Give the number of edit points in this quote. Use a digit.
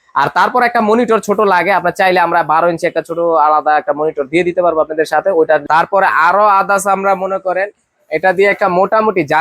1